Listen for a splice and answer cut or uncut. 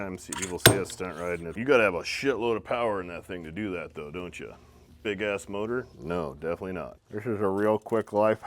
cut